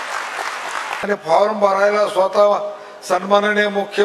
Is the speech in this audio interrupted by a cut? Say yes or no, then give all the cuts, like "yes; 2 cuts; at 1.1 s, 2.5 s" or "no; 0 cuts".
yes; 1 cut; at 1.0 s